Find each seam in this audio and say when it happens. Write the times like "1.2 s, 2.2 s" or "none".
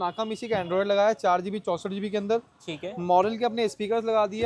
none